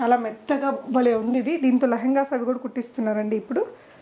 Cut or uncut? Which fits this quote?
uncut